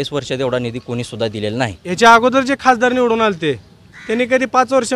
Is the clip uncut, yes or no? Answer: no